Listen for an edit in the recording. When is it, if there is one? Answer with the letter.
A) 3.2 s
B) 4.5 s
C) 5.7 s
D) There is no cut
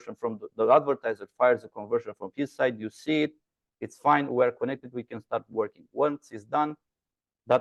D